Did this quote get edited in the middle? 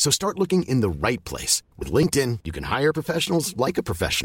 no; 0 cuts

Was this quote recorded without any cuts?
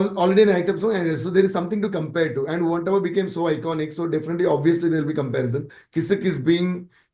no; 1 cut; at 5.7 s

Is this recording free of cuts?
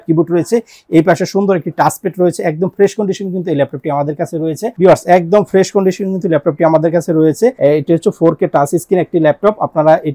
no; 2 cuts; at 4.7 s, 7.6 s

